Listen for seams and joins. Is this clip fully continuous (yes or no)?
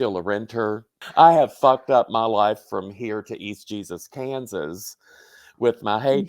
no